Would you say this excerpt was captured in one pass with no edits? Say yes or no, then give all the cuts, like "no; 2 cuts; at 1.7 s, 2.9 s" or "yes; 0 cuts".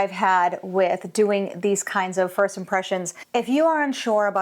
no; 1 cut; at 3.2 s